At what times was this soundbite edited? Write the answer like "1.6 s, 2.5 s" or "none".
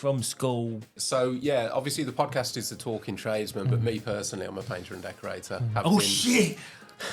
1.0 s

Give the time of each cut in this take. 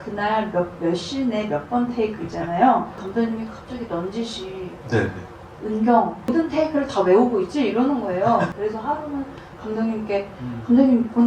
3.0 s, 6.3 s, 8.5 s

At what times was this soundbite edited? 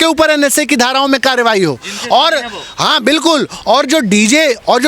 none

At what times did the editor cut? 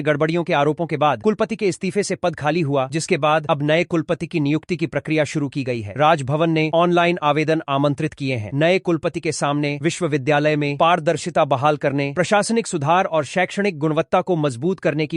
none

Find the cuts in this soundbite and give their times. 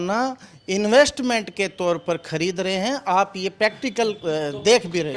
none

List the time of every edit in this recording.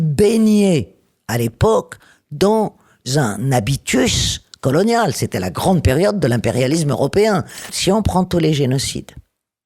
7.7 s

